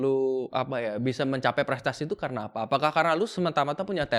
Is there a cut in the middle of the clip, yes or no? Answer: no